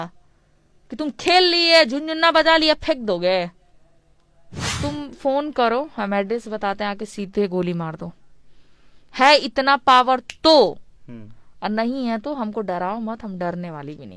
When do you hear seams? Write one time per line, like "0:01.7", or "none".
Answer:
0:04.6